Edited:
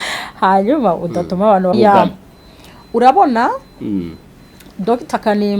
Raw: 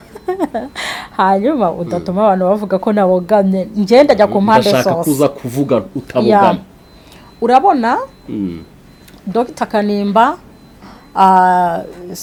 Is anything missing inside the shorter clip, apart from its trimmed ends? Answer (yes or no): yes